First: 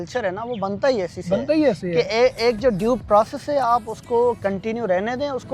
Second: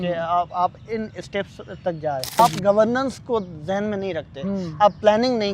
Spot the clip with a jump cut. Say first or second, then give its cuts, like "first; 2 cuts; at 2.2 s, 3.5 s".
second; 1 cut; at 2.4 s